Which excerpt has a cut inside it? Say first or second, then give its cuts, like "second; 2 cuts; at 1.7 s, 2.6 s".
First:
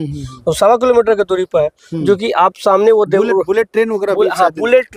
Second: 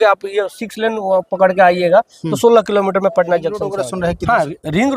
second; 1 cut; at 3.8 s